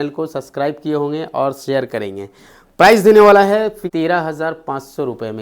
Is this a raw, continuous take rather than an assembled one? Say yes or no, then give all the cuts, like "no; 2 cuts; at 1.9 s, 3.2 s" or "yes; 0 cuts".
no; 1 cut; at 3.8 s